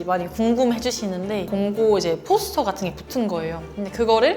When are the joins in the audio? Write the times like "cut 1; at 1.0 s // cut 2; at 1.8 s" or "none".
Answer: cut 1; at 1.5 s